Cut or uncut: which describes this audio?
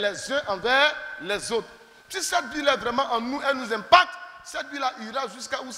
uncut